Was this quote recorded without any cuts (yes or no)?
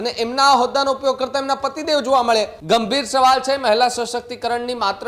no